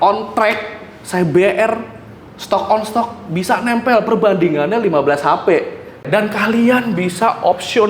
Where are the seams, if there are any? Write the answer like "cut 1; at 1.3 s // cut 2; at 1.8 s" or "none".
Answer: cut 1; at 6.0 s